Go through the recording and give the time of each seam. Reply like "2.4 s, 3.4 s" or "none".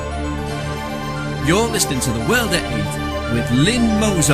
none